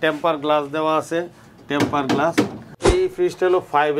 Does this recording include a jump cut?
yes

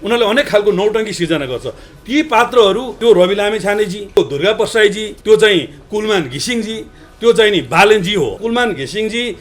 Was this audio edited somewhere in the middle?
yes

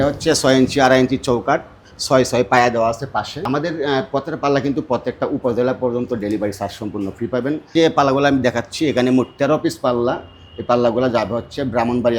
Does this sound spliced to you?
yes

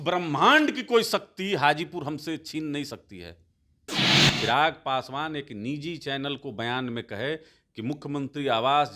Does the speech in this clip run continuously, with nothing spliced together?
no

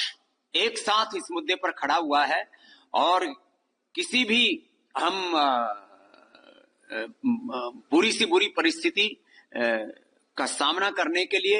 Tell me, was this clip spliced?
no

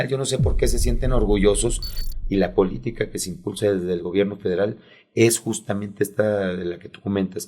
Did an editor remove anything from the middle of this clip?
yes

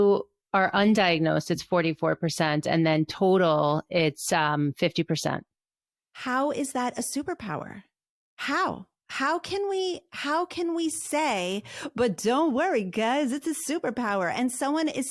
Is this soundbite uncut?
yes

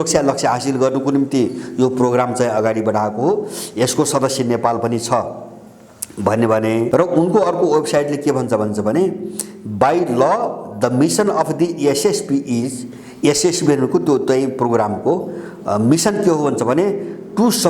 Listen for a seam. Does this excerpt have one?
yes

